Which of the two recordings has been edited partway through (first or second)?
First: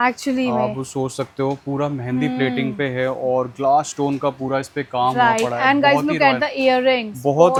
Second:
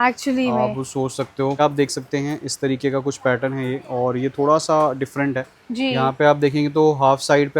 second